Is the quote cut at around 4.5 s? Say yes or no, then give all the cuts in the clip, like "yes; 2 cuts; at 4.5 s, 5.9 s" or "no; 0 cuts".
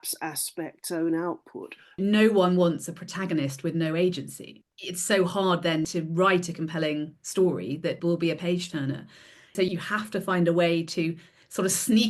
yes; 5 cuts; at 2.0 s, 4.5 s, 5.9 s, 8.0 s, 9.5 s